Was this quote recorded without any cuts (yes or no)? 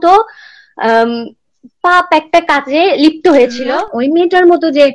no